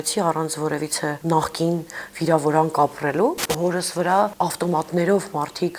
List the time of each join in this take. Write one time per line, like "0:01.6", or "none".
0:01.2
0:03.5
0:04.3